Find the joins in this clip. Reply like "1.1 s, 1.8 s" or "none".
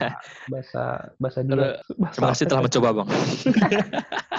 1.8 s